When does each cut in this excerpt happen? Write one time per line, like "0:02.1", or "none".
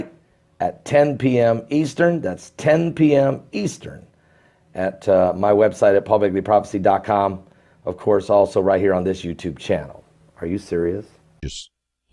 0:11.1